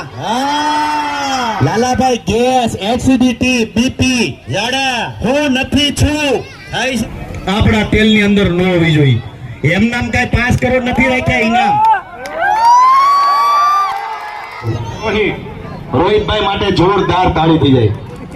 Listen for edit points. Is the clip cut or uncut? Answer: cut